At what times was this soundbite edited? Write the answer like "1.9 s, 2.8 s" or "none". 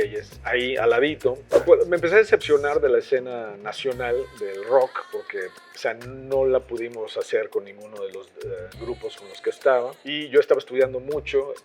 1.6 s, 10.2 s